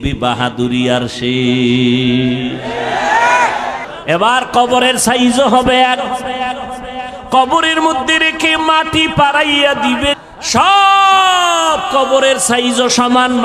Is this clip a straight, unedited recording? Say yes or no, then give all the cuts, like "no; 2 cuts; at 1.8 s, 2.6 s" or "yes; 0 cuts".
no; 2 cuts; at 3.9 s, 10.2 s